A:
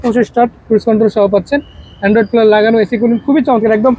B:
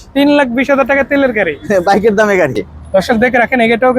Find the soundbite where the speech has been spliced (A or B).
B